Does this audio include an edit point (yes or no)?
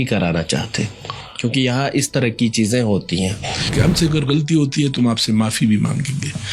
yes